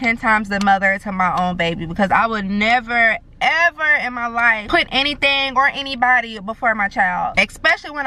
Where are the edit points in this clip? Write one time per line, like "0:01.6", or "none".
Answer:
none